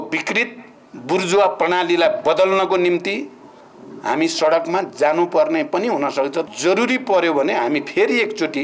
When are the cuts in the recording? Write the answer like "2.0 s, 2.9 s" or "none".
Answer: 6.4 s